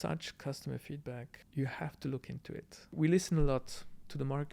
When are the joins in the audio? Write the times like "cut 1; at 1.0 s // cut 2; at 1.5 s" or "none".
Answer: cut 1; at 1.4 s // cut 2; at 2.9 s